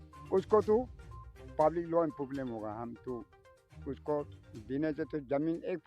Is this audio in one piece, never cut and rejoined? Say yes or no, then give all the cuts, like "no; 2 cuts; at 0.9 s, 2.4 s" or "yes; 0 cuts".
yes; 0 cuts